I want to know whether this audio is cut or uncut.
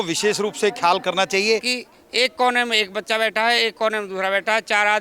cut